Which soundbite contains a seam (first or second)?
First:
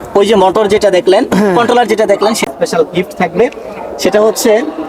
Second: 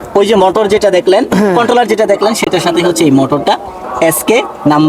first